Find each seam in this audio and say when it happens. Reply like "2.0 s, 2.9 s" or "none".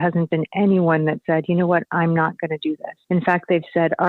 2.9 s

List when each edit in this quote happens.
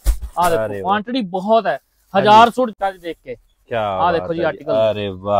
2.7 s

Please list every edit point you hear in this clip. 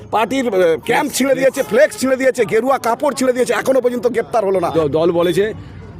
4.7 s

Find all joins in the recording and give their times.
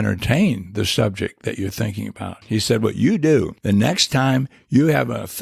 2.4 s, 3.6 s

